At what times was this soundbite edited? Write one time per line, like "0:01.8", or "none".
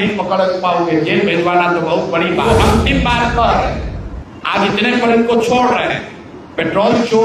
0:02.4

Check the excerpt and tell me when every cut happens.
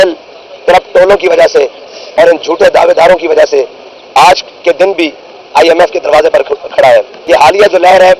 0:07.3

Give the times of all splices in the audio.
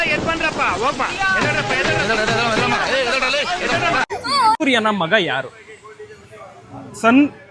0:04.6

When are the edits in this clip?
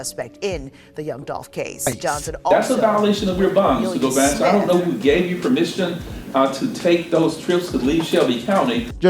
0:02.5

